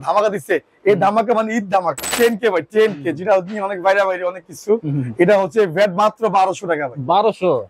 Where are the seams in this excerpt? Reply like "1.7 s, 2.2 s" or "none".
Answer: 2.1 s